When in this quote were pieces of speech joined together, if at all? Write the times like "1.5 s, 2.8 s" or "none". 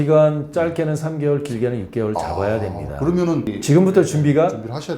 3.5 s